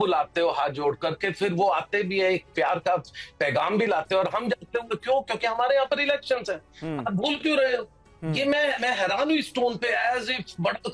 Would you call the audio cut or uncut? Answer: uncut